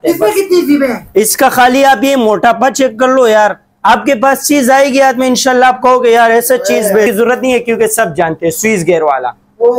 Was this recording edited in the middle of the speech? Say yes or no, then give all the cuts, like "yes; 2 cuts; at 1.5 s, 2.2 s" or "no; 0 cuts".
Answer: yes; 2 cuts; at 1.3 s, 7.1 s